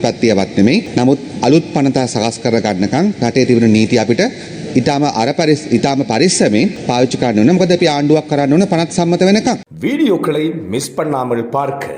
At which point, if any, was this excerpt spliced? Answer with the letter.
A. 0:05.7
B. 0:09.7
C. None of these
B